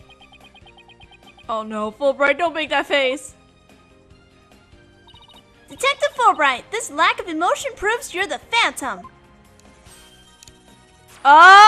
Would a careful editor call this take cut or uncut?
cut